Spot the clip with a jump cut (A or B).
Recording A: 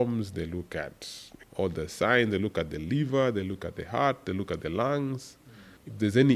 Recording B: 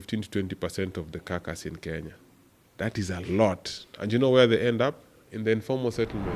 A